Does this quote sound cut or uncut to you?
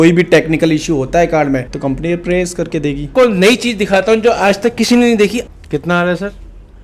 cut